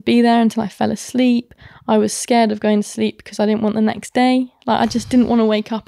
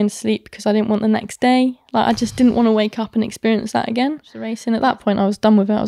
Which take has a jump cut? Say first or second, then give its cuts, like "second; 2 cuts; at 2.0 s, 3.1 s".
second; 1 cut; at 4.6 s